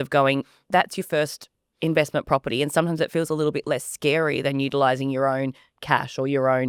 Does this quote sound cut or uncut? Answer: uncut